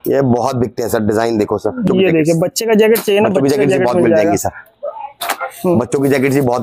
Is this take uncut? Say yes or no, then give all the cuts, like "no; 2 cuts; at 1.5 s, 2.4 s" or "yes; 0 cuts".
no; 1 cut; at 1.8 s